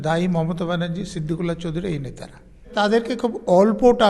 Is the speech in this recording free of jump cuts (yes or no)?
no